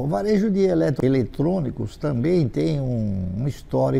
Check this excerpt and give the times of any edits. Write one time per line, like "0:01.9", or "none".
0:01.0